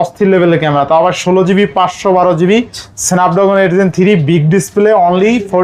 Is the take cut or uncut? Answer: uncut